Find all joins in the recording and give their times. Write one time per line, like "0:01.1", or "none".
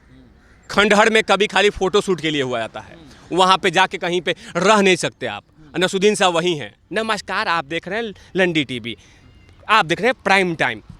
0:06.8